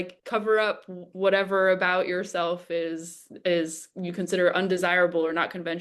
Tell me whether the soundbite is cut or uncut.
uncut